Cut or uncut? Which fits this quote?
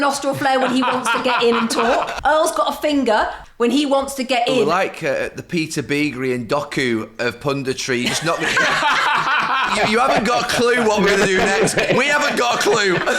cut